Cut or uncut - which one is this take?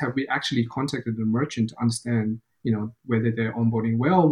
uncut